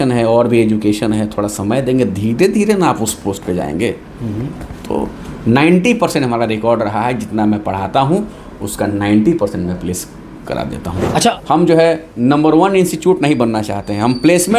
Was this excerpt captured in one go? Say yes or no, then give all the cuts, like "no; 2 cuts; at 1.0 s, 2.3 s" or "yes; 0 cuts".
no; 1 cut; at 11.3 s